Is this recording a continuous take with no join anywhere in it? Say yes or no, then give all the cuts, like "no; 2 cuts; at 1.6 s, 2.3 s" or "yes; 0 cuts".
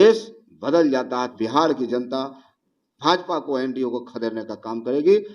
no; 1 cut; at 1.3 s